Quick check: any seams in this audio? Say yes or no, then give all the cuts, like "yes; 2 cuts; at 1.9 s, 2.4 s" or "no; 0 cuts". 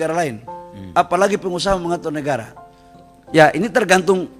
yes; 1 cut; at 3.1 s